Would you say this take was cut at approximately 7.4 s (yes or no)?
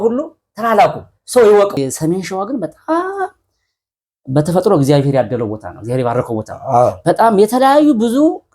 no